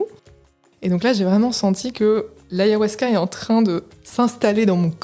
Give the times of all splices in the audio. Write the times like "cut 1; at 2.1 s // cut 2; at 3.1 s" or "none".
cut 1; at 2.4 s // cut 2; at 3.9 s